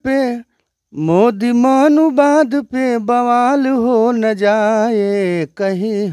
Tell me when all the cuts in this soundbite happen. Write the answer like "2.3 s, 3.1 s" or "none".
none